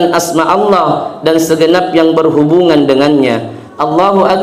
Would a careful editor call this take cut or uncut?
uncut